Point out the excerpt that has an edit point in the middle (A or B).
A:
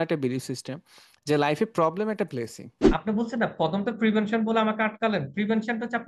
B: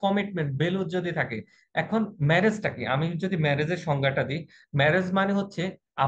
A